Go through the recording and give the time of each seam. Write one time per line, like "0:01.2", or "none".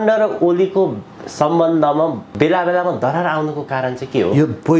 0:02.2